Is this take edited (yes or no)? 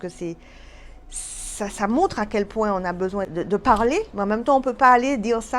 yes